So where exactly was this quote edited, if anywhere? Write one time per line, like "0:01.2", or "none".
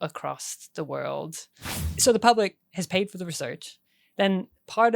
0:02.0